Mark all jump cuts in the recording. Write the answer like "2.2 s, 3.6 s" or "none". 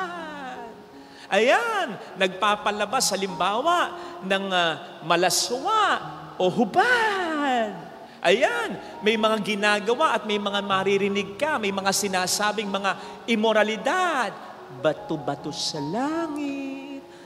none